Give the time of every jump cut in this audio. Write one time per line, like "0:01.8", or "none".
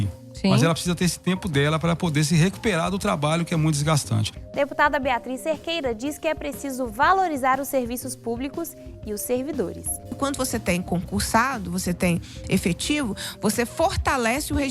0:04.4
0:10.1